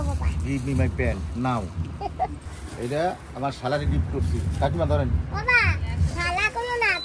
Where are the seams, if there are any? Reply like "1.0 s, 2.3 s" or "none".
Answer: 2.5 s